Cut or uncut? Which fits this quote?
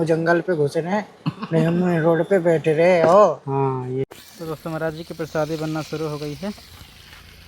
cut